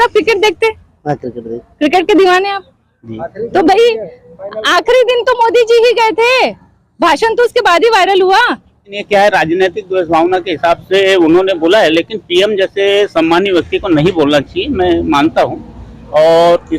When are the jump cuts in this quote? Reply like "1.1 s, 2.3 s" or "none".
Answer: 8.9 s